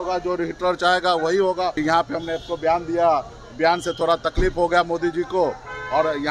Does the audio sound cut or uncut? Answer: cut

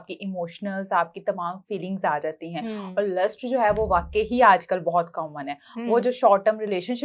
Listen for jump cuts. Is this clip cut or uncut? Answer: uncut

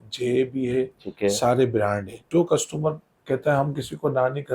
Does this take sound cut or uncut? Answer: cut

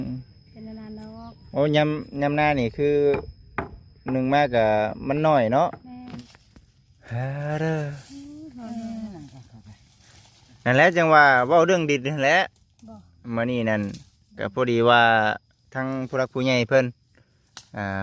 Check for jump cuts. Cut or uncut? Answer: cut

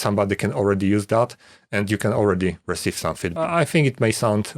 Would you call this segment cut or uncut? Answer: cut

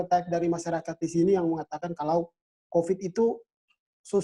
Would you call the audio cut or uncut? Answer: uncut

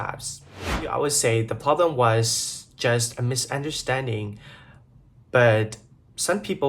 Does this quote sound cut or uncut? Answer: cut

